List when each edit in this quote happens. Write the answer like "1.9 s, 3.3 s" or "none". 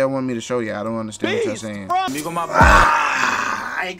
2.1 s